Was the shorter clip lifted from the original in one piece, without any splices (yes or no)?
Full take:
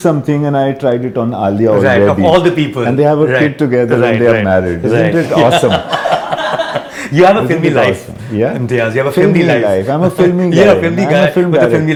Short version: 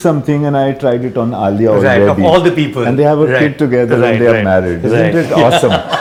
yes